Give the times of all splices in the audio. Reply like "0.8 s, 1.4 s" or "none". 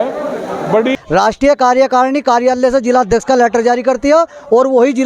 0.9 s

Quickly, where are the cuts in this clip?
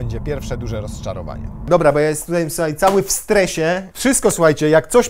1.7 s, 3.9 s

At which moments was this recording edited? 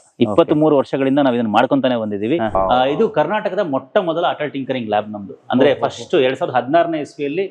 2.6 s

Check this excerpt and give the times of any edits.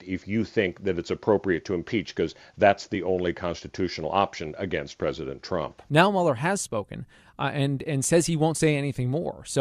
5.8 s

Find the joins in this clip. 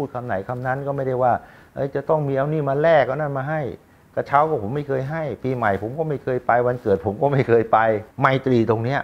8.1 s

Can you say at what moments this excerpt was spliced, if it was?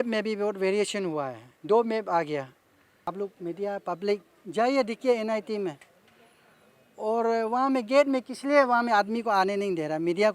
3.1 s

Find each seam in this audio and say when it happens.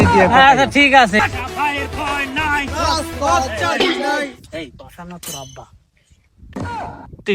1.2 s

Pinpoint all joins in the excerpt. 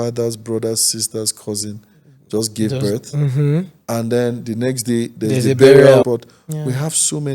6.0 s

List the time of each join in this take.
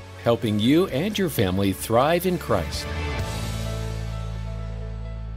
2.7 s

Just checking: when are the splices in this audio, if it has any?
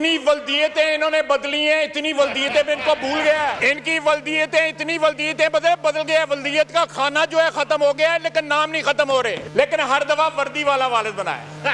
3.6 s, 9.4 s

